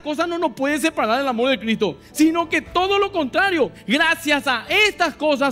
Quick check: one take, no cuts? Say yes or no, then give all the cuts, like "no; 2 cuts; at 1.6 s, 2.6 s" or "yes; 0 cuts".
yes; 0 cuts